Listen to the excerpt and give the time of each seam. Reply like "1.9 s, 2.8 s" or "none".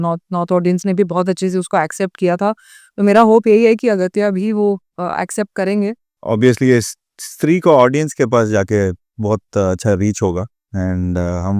6.1 s, 10.6 s

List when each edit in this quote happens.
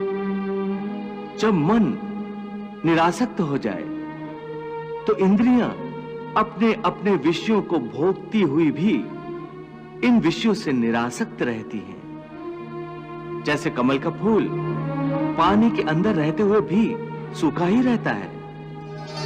none

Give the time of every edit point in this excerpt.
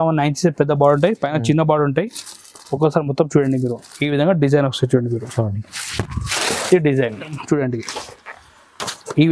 7.4 s

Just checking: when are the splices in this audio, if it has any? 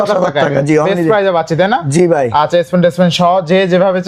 none

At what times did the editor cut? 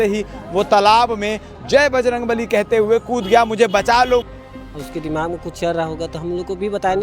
4.3 s

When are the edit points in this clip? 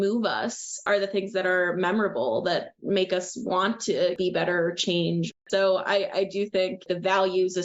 0.8 s, 4.2 s, 5.3 s, 6.8 s

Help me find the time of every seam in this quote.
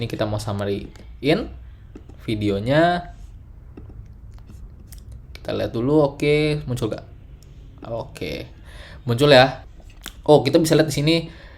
9.7 s

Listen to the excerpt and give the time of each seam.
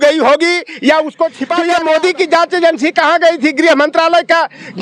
1.4 s

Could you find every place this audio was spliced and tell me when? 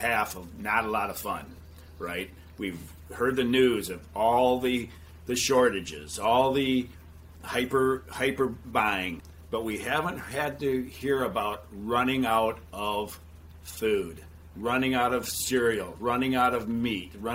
9.2 s

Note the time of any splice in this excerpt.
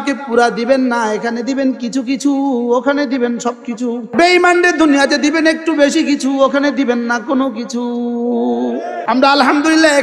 4.1 s, 9.0 s

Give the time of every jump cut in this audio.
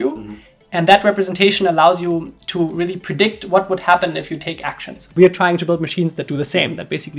5.1 s

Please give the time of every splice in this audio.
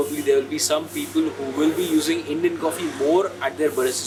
none

